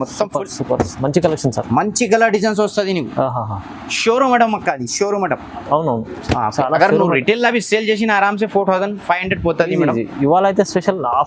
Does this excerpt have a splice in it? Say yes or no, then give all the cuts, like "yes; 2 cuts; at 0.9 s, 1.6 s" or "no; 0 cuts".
no; 0 cuts